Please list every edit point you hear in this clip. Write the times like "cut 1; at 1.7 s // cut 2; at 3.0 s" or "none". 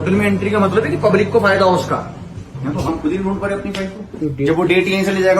cut 1; at 2.9 s // cut 2; at 4.2 s